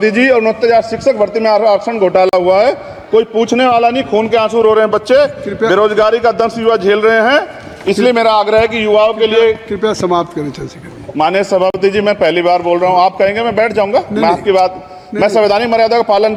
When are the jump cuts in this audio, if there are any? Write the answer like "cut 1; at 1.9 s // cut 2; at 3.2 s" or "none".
none